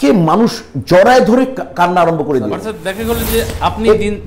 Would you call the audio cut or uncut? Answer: cut